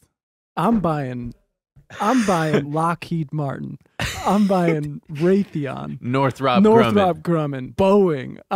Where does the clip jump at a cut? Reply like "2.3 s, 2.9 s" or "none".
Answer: 2.7 s, 7.6 s

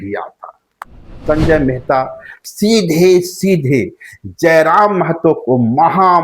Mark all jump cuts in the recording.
1.2 s

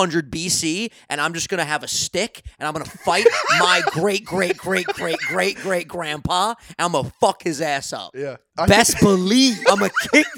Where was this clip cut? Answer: 8.4 s, 9.6 s

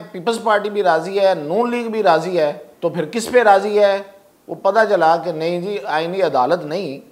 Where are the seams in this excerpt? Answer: 2.7 s

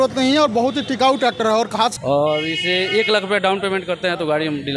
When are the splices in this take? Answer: 2.0 s

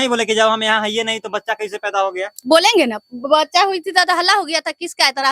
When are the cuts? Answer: none

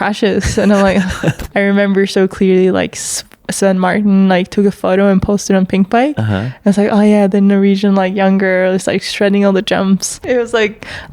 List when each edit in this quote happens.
1.4 s, 10.2 s

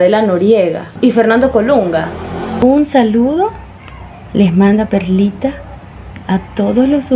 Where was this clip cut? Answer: 0.9 s, 2.5 s

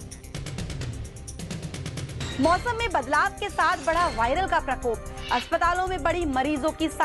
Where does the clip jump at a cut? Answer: 0.9 s

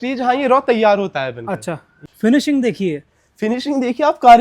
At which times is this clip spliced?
1.9 s

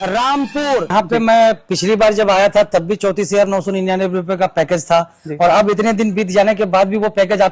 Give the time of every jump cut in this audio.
0.9 s

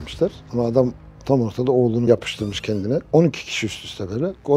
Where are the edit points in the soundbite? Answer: none

